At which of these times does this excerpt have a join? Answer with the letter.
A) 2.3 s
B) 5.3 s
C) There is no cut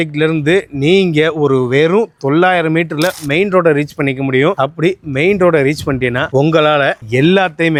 C